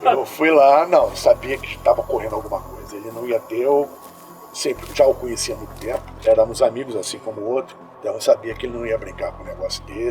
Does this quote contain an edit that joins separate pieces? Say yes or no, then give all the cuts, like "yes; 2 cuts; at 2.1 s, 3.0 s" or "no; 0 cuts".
no; 0 cuts